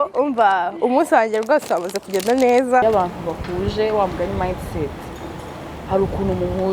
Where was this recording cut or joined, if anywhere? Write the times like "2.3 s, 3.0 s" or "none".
2.8 s